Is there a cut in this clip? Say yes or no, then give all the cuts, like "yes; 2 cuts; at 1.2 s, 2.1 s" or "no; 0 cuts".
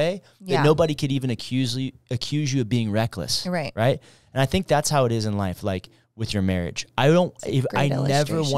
no; 0 cuts